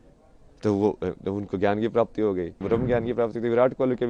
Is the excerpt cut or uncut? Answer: cut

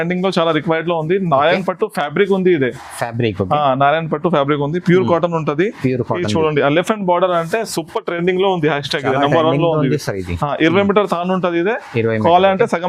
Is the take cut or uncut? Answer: uncut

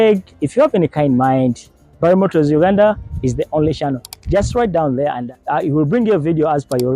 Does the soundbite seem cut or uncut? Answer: cut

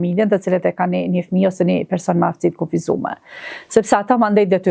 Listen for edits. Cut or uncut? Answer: uncut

